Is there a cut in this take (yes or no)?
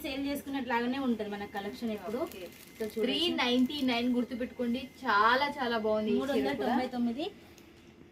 no